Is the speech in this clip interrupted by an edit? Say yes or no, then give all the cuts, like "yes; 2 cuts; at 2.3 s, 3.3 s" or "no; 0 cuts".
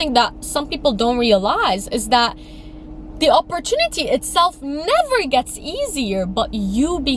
no; 0 cuts